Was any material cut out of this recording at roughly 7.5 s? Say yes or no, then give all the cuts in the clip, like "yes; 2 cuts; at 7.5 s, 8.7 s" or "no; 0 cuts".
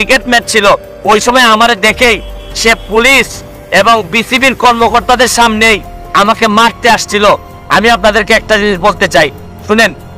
yes; 1 cut; at 7.5 s